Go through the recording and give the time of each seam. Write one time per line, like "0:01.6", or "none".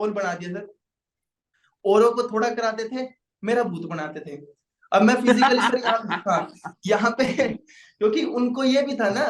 none